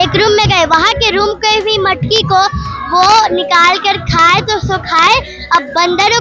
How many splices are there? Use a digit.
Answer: 0